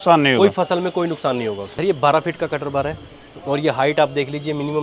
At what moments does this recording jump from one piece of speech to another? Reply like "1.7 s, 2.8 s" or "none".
1.6 s